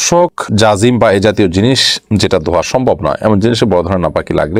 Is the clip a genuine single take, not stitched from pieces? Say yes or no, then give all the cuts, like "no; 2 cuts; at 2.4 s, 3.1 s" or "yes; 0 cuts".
yes; 0 cuts